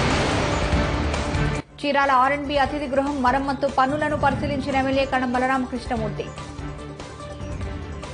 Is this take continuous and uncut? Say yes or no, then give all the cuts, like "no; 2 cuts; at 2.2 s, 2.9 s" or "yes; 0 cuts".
yes; 0 cuts